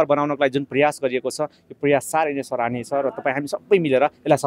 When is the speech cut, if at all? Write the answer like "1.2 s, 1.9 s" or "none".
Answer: none